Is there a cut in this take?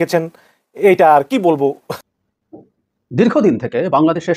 yes; 1 cut; at 2.0 s

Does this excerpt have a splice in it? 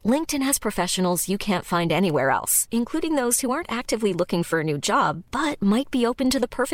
no; 0 cuts

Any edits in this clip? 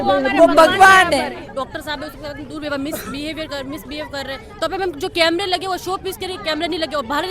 no; 0 cuts

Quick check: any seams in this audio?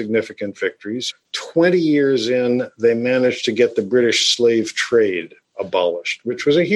yes; 1 cut; at 1.0 s

